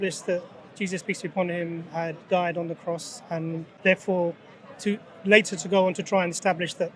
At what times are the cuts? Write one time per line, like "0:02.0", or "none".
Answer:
0:03.7